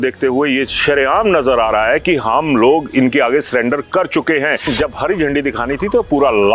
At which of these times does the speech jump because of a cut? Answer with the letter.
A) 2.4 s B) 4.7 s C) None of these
B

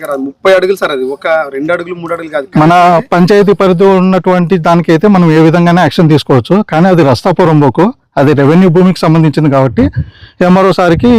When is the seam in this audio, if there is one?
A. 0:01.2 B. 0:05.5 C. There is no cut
C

